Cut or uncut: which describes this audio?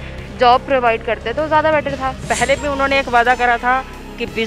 cut